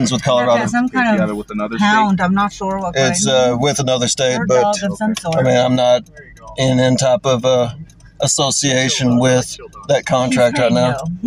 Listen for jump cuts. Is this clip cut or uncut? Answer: uncut